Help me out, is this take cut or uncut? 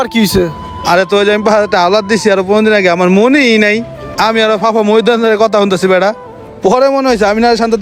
uncut